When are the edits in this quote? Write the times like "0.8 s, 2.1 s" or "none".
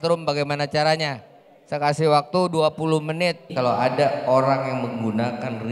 3.4 s